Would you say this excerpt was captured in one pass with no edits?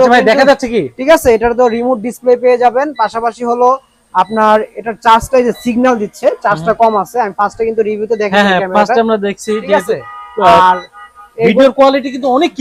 yes; 0 cuts

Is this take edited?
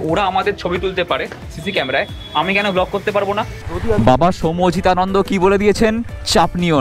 yes; 1 cut; at 3.7 s

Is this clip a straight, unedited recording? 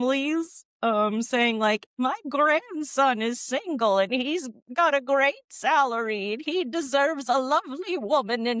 yes; 0 cuts

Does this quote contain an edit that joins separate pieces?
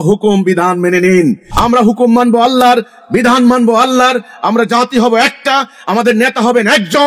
yes; 1 cut; at 1.5 s

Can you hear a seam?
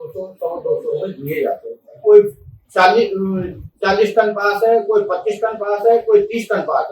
yes; 1 cut; at 2.0 s

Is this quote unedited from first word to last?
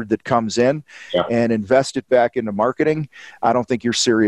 yes; 0 cuts

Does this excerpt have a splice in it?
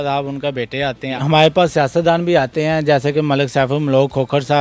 yes; 1 cut; at 1.1 s

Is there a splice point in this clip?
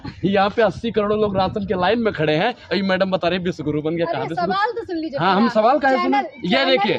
no; 0 cuts

